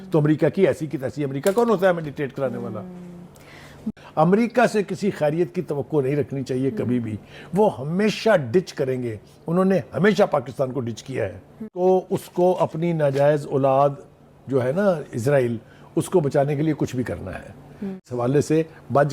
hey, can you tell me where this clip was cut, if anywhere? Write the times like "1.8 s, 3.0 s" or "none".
3.8 s, 11.7 s, 18.1 s